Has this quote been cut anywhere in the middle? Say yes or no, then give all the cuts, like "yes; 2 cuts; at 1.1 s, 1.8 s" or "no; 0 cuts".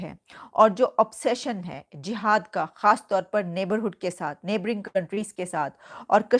no; 0 cuts